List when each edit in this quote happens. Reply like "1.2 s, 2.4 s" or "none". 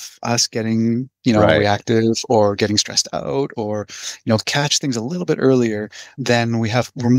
6.1 s